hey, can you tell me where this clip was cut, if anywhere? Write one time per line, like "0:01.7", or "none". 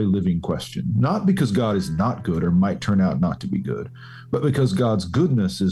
none